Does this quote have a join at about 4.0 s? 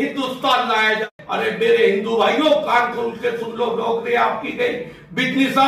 no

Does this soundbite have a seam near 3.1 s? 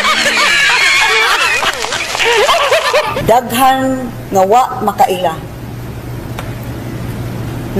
yes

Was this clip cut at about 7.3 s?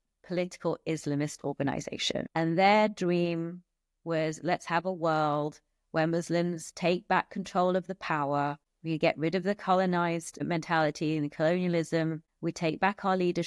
no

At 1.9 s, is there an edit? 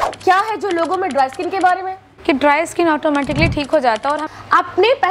yes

